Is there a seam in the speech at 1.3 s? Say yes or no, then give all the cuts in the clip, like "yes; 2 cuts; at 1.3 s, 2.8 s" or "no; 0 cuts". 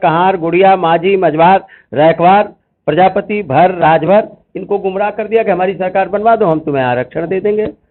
no; 0 cuts